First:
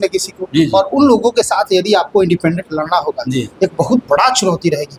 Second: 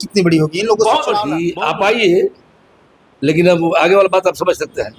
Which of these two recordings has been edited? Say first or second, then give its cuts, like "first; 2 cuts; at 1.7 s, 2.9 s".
second; 1 cut; at 1.3 s